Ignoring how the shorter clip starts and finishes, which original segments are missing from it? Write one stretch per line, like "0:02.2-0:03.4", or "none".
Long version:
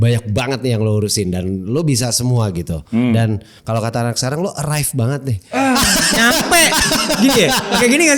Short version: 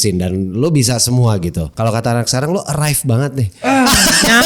0:02.8-0:03.5